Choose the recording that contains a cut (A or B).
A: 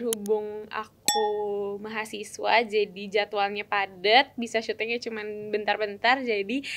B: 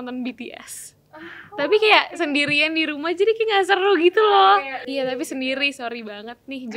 B